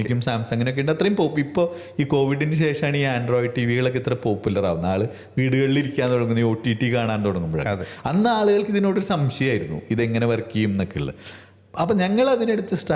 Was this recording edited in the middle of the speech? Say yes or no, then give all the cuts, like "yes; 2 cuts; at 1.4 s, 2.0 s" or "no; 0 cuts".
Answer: no; 0 cuts